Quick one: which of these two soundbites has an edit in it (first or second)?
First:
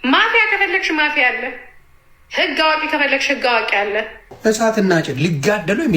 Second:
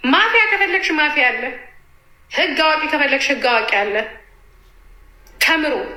first